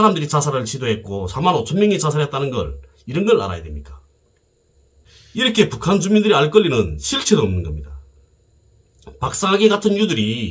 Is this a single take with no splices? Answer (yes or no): no